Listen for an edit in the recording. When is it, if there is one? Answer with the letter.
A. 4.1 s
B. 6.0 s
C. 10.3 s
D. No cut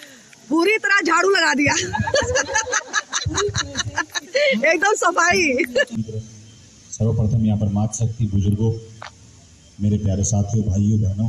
B